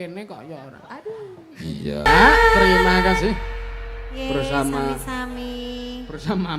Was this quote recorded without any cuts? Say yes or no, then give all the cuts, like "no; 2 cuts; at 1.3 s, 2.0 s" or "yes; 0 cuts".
no; 1 cut; at 2.1 s